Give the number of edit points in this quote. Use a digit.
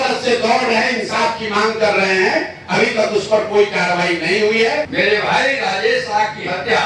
1